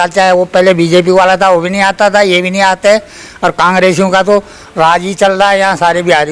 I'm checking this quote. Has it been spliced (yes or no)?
no